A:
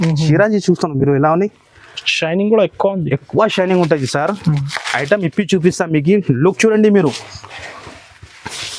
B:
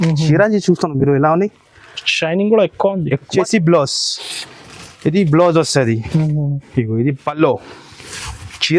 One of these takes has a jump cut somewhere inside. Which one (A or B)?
B